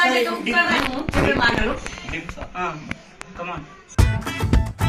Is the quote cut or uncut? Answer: uncut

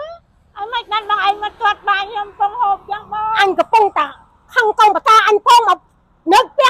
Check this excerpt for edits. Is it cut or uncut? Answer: uncut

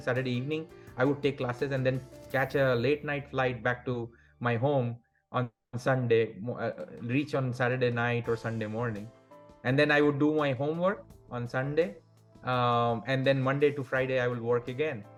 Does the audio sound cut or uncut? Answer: uncut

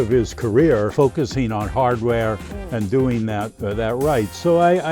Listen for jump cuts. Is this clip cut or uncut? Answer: cut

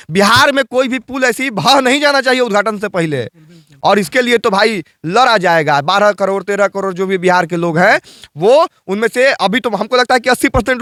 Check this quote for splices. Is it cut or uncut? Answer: uncut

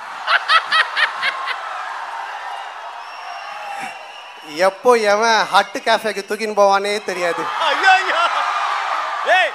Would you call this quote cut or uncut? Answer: uncut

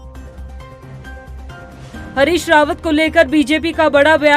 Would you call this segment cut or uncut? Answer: cut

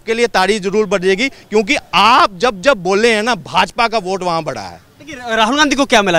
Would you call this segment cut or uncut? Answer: uncut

